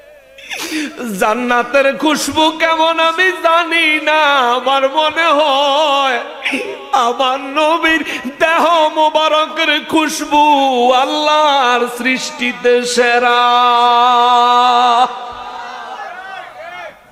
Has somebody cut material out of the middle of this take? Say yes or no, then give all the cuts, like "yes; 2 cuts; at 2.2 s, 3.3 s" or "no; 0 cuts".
no; 0 cuts